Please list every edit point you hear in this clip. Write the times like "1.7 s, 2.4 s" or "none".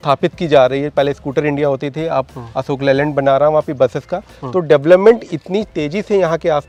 none